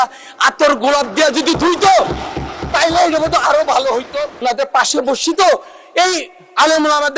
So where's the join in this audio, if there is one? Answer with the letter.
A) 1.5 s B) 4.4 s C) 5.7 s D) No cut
B